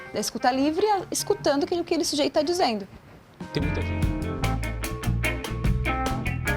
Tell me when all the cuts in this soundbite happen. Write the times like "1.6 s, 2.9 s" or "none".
3.5 s